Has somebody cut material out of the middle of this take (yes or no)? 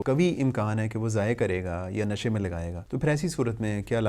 yes